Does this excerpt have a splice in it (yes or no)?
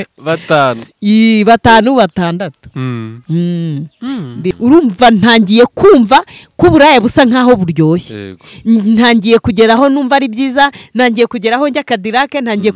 yes